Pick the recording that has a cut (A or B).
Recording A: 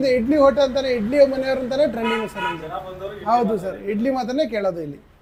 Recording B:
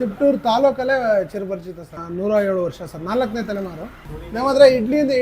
B